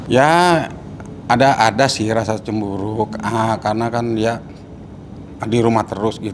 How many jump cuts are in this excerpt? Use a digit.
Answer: 0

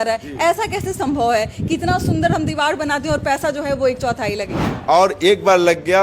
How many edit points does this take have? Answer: 1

